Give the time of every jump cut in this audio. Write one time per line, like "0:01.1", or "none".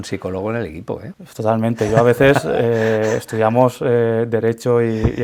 none